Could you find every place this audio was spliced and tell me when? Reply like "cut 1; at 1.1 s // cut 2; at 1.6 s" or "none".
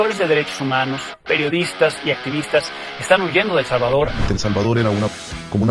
cut 1; at 4.2 s